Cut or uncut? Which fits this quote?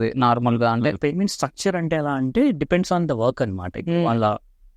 cut